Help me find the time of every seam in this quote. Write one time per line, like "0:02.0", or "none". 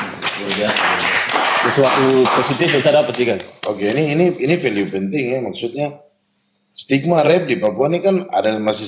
none